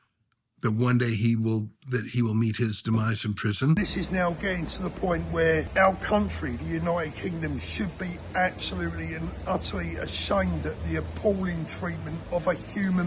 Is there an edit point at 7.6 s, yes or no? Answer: no